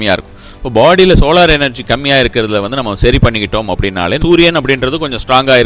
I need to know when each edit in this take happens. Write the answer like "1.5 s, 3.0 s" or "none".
4.2 s